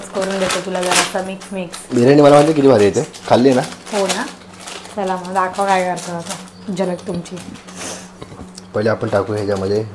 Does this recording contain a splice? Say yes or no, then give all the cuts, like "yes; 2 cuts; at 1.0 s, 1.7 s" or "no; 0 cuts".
no; 0 cuts